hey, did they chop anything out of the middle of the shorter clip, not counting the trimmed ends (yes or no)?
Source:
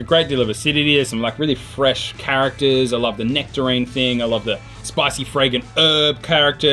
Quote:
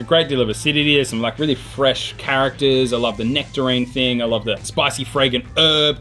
yes